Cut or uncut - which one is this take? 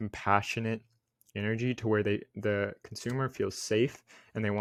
uncut